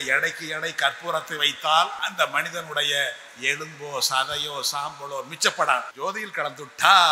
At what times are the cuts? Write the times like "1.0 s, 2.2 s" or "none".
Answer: 2.0 s, 5.9 s